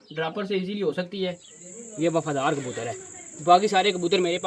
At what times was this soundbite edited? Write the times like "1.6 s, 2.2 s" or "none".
1.4 s